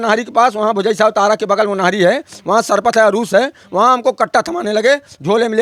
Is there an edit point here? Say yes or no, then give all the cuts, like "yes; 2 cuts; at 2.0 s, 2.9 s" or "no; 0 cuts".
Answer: no; 0 cuts